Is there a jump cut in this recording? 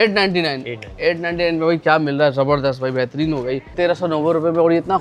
yes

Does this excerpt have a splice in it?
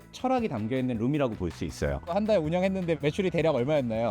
yes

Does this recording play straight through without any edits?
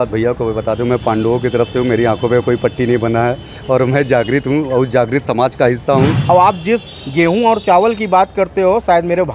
no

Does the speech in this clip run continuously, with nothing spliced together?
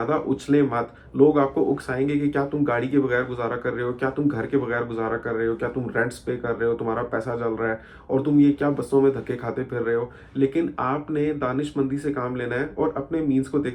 yes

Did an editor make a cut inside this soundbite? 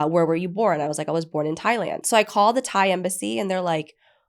yes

